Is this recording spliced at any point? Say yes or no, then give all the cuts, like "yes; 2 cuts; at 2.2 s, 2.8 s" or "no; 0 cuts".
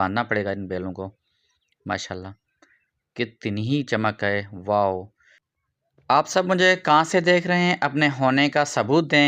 no; 0 cuts